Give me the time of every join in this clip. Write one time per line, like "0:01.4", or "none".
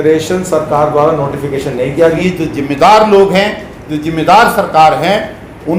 0:02.1